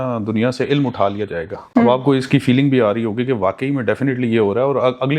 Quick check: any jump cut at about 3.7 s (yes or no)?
no